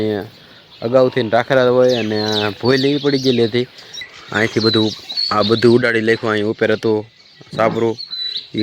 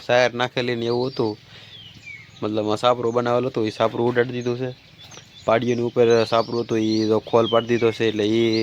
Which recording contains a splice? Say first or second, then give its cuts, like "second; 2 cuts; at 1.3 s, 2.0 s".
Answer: first; 1 cut; at 4.2 s